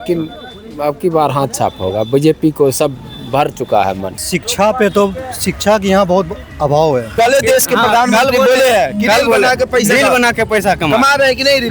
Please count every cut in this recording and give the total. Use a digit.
2